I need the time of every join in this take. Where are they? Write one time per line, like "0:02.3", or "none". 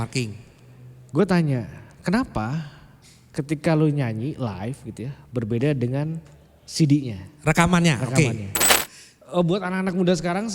0:08.7